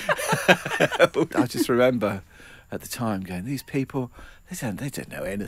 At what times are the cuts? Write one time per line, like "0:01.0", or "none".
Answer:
0:01.3